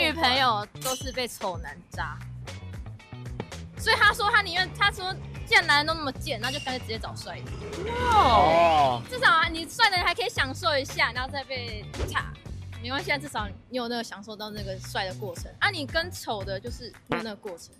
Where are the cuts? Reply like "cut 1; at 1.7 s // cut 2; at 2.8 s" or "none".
none